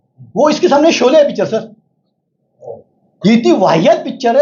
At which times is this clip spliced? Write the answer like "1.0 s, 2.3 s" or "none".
none